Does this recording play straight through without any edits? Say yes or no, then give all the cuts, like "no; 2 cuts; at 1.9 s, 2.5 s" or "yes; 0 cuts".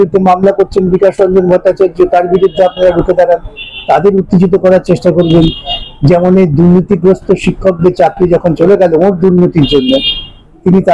yes; 0 cuts